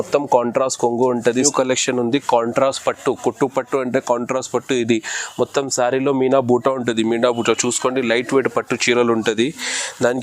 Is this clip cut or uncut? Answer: cut